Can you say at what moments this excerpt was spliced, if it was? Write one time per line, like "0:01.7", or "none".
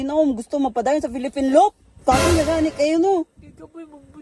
0:01.9

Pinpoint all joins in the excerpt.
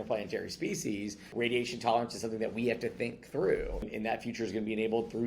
0:01.3
0:03.9

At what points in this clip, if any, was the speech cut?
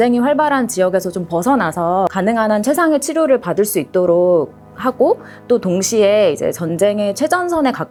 none

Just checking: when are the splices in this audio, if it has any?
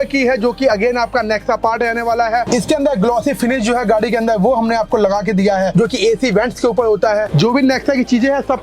0:02.4
0:07.3

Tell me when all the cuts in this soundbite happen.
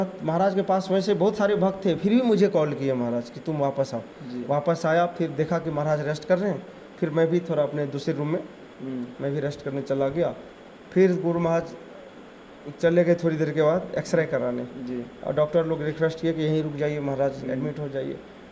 none

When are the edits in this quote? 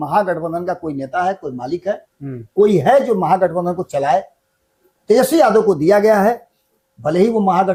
none

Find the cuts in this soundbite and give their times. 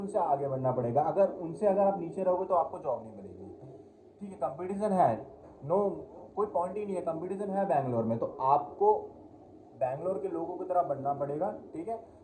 none

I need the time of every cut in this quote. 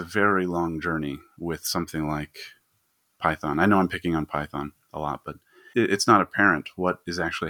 0:05.6

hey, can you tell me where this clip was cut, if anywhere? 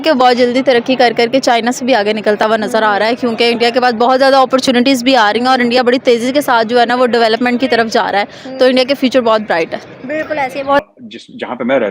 0:10.8

